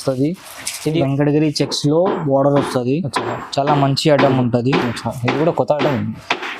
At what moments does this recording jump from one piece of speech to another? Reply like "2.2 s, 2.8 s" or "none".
1.0 s